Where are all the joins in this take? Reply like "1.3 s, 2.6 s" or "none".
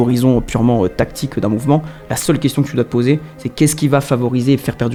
none